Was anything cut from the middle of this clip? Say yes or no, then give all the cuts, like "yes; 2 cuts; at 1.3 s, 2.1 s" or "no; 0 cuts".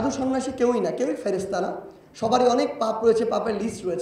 no; 0 cuts